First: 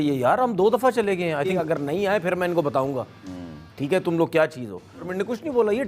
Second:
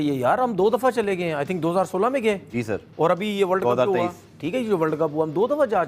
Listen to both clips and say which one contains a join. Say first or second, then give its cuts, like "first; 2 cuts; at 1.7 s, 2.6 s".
first; 2 cuts; at 1.6 s, 5.1 s